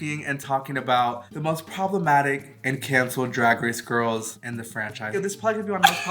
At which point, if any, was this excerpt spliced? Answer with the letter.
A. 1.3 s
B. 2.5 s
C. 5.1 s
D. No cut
C